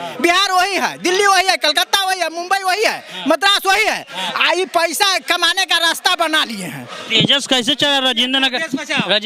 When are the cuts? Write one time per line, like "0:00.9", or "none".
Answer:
none